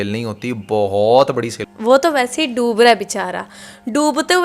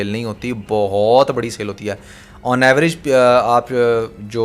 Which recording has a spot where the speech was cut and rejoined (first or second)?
first